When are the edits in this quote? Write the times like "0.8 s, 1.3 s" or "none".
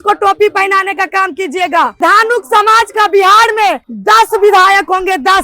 2.0 s, 3.9 s

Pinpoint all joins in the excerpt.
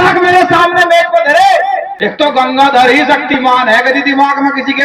2.0 s

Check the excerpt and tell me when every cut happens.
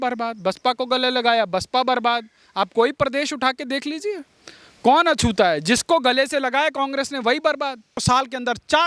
8.0 s

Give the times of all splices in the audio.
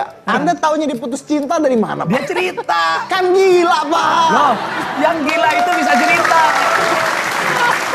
none

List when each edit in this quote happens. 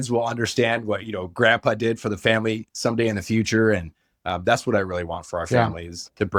none

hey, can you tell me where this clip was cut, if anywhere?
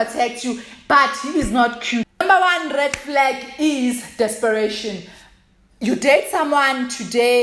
2.1 s

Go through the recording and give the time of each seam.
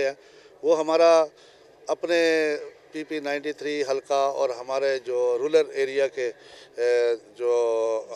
none

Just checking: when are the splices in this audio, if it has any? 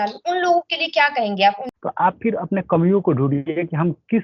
1.7 s

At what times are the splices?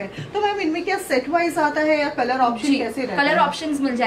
none

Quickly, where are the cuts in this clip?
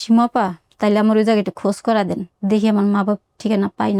none

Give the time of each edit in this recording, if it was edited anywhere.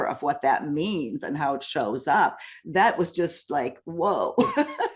none

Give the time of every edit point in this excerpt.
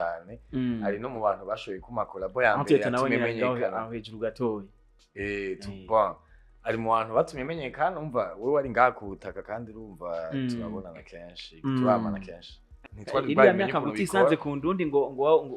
12.9 s

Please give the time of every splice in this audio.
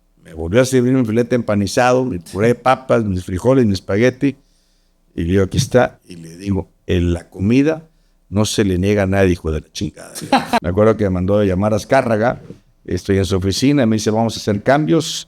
10.6 s

